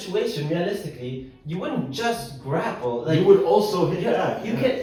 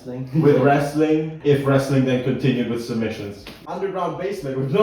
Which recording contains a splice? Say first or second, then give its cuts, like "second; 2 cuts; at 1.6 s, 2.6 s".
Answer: second; 2 cuts; at 1.3 s, 3.5 s